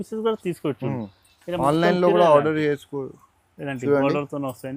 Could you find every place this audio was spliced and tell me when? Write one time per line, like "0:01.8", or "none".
none